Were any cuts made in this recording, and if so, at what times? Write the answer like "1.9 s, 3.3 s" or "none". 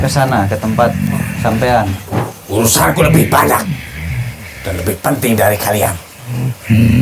2.1 s